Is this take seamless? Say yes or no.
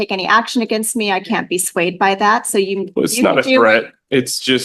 yes